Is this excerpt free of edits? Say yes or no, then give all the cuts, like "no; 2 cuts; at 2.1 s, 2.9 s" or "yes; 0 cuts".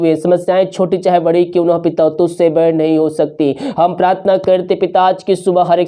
yes; 0 cuts